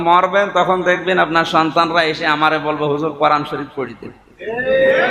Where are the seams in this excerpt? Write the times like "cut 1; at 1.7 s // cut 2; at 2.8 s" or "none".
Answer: none